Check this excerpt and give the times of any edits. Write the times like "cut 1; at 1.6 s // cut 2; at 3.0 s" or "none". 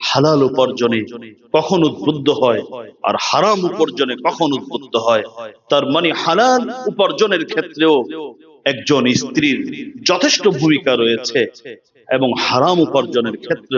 none